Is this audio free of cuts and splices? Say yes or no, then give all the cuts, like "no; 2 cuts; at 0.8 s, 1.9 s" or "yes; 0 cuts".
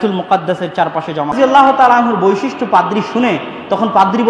no; 1 cut; at 1.3 s